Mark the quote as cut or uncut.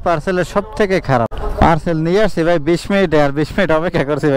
cut